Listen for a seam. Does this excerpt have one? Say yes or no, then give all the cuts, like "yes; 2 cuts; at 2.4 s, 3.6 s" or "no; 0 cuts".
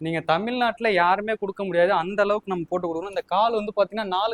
no; 0 cuts